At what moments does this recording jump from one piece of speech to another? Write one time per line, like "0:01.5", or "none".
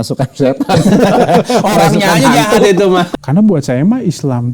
0:03.1